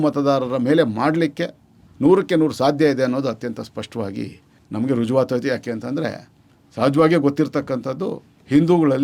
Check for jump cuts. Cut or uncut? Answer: uncut